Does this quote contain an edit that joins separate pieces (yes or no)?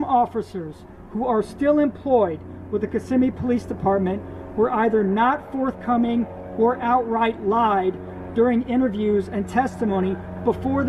no